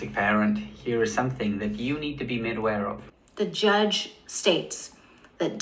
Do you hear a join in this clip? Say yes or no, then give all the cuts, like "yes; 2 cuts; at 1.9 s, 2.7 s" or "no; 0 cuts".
yes; 1 cut; at 3.0 s